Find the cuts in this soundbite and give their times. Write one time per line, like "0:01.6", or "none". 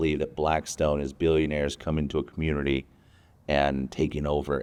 none